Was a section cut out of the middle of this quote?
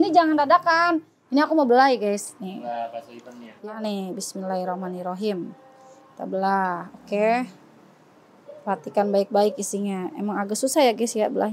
yes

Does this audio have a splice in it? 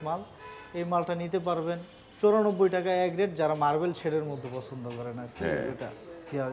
no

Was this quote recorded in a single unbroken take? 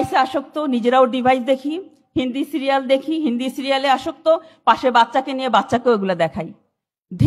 yes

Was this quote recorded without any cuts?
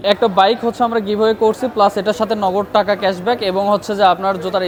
yes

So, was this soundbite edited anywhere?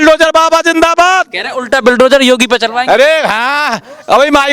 no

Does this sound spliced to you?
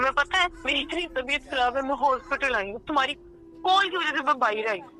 no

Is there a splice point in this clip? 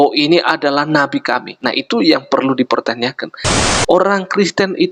yes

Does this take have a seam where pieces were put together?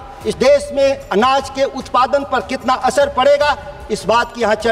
no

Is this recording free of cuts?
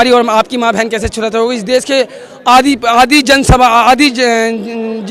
yes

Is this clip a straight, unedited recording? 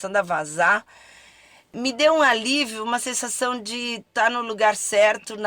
no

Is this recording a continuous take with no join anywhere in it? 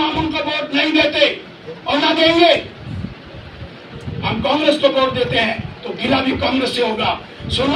yes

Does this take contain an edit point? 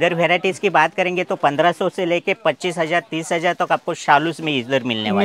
no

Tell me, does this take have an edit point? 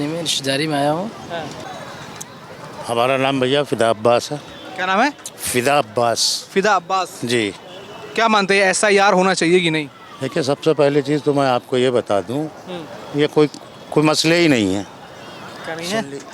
yes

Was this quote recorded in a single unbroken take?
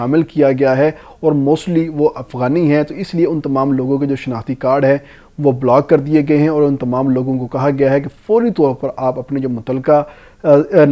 yes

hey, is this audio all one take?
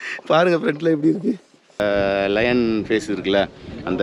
no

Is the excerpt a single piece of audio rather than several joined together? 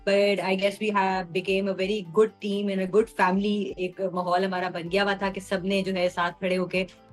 yes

